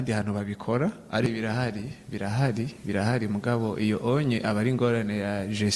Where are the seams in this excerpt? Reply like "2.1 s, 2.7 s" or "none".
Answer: 1.3 s